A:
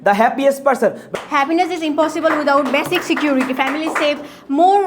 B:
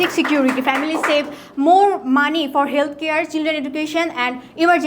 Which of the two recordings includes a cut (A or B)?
A